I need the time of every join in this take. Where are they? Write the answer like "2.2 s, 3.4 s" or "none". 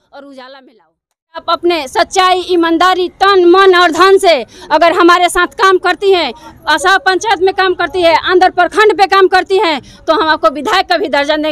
1.4 s